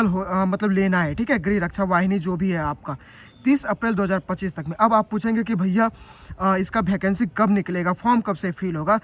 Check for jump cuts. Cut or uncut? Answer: uncut